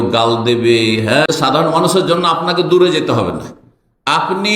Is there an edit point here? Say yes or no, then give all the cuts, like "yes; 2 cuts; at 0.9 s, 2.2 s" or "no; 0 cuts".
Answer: yes; 1 cut; at 1.3 s